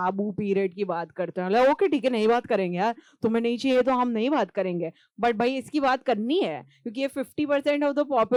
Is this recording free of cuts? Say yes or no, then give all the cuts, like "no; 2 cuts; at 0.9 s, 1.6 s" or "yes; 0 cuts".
yes; 0 cuts